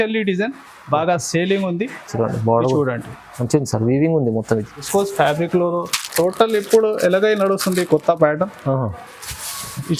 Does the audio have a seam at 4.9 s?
yes; 1 cut; at 4.9 s

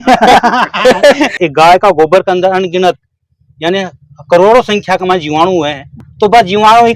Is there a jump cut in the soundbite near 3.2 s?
no; 2 cuts; at 1.3 s, 5.9 s

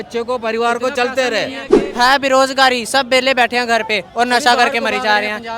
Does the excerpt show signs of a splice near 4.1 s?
no; 1 cut; at 1.8 s

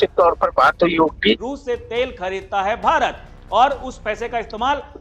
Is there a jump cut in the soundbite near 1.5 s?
yes; 1 cut; at 1.5 s

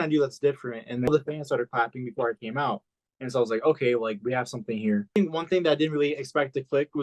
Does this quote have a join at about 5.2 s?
yes; 2 cuts; at 1.1 s, 5.2 s

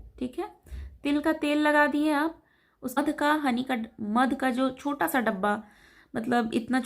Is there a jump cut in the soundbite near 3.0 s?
yes; 1 cut; at 3.0 s

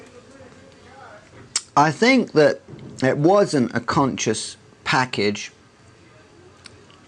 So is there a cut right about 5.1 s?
yes; 1 cut; at 5.1 s

